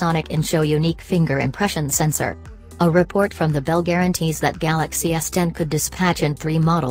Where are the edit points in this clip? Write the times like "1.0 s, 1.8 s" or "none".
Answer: none

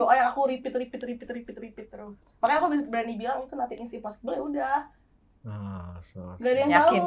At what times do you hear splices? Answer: none

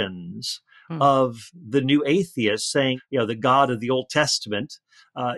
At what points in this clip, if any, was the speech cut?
3.0 s

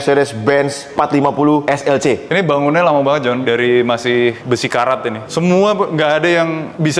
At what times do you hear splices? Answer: 2.3 s, 3.4 s, 5.2 s

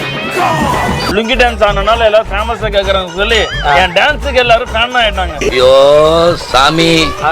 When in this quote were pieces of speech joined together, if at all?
1.1 s

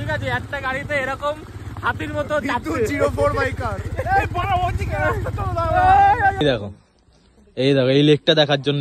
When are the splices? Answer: 6.4 s

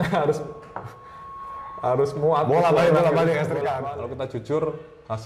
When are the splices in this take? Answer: 3.9 s

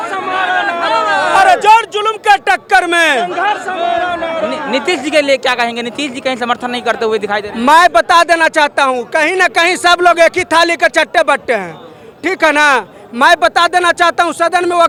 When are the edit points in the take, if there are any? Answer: none

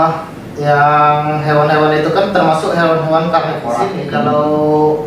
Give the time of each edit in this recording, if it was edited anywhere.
4.0 s

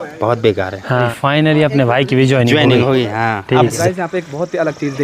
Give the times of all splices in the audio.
1.1 s, 3.7 s

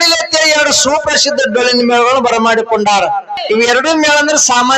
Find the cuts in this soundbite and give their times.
3.4 s

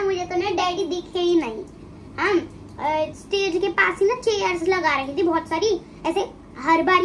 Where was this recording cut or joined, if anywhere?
none

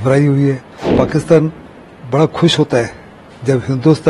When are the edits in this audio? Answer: 0.9 s

